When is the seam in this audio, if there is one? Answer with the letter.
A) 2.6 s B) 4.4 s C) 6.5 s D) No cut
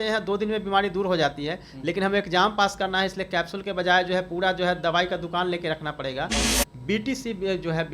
C